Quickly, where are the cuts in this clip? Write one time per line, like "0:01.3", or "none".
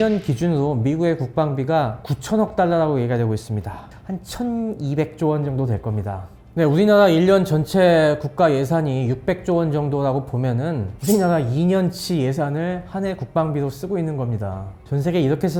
none